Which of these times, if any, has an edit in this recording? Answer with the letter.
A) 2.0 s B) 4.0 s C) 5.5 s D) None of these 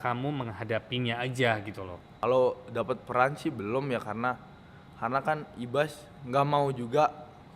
A